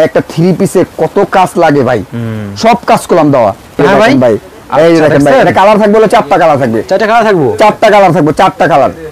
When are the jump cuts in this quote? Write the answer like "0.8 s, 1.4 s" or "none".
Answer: 3.8 s